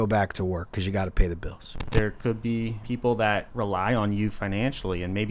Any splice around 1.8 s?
yes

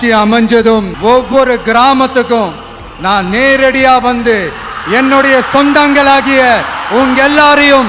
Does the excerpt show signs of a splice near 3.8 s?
no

